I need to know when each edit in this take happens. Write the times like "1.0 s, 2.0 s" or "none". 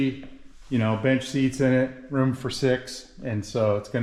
none